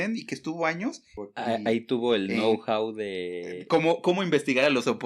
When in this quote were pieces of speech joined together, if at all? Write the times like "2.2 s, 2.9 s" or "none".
1.2 s